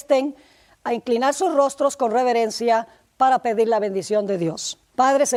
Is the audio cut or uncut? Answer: uncut